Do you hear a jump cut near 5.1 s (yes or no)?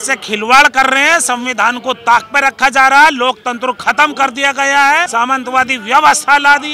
yes